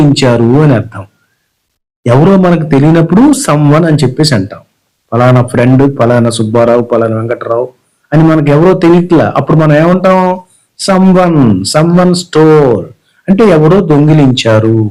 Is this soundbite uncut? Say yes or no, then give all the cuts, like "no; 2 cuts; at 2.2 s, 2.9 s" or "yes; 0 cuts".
yes; 0 cuts